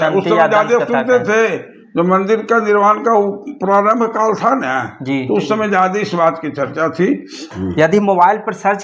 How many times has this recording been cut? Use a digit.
0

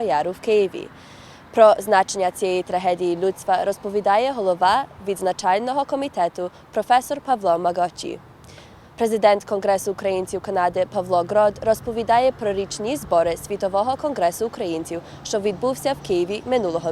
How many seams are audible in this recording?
1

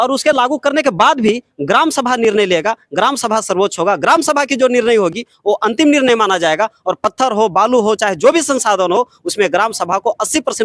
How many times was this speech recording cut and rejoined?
0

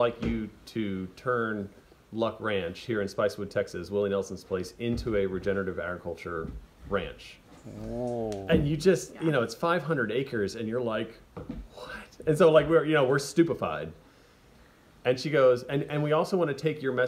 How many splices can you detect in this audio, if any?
0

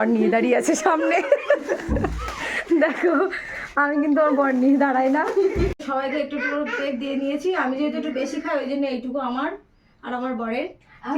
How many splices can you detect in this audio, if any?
0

